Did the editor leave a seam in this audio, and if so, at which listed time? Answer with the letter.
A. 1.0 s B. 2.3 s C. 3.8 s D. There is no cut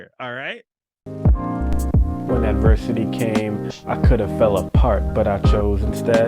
A